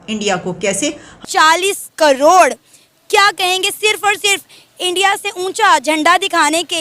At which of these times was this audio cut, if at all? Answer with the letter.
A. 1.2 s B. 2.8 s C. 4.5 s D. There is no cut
A